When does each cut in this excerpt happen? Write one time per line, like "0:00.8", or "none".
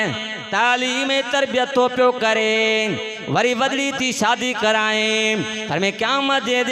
none